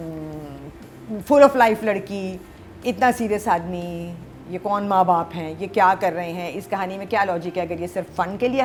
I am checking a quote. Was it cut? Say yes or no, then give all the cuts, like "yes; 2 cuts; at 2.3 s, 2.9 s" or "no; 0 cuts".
no; 0 cuts